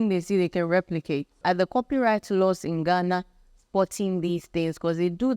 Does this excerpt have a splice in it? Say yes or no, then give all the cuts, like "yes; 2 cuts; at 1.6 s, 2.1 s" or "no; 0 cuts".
yes; 1 cut; at 1.3 s